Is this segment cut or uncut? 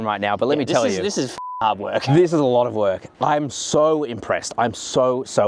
uncut